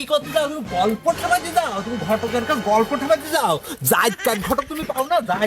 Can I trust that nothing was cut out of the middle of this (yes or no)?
yes